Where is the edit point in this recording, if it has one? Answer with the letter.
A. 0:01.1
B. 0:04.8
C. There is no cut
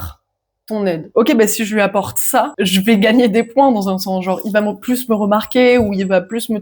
A